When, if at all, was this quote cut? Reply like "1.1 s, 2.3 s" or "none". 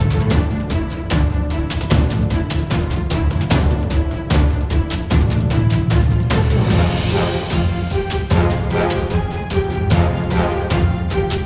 none